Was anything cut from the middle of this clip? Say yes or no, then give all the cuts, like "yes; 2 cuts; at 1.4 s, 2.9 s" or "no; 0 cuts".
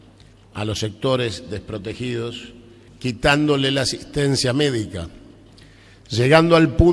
no; 0 cuts